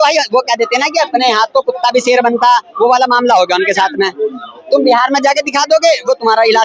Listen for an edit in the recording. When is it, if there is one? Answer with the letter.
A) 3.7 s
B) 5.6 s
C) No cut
C